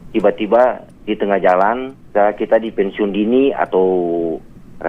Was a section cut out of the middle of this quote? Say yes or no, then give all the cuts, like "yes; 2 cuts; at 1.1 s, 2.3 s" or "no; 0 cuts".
yes; 1 cut; at 1.9 s